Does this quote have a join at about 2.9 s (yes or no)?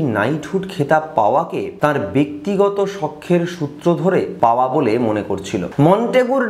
no